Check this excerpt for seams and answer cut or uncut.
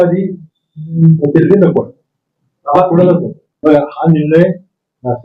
cut